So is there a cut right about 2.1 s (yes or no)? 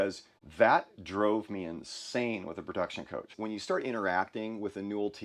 no